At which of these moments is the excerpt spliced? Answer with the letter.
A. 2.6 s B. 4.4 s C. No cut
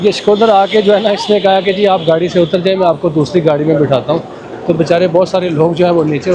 C